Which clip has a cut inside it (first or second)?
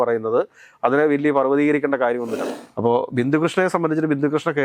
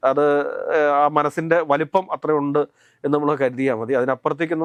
first